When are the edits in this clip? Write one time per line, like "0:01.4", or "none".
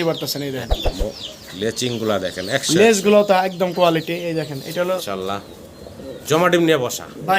0:05.0

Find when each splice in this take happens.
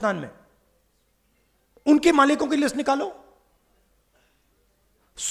none

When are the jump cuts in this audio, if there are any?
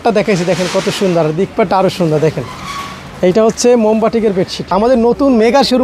0:04.6

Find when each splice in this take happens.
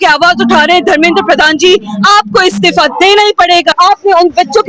0:03.7

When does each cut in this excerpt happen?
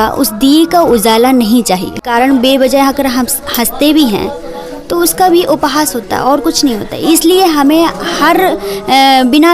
0:02.0

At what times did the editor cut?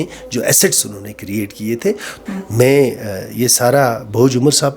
0:02.1

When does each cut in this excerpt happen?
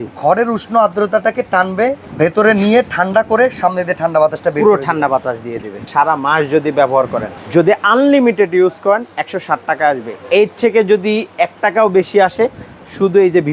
0:02.0
0:05.8
0:07.3

